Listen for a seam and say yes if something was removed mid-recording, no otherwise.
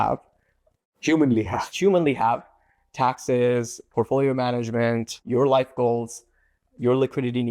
yes